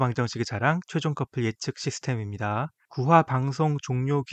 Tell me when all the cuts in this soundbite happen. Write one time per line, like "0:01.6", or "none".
0:02.8